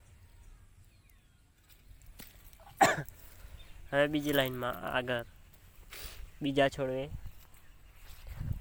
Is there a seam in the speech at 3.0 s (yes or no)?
no